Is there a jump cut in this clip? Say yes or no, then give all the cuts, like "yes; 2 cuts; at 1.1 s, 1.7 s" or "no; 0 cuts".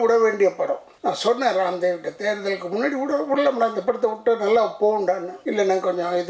yes; 2 cuts; at 0.9 s, 5.3 s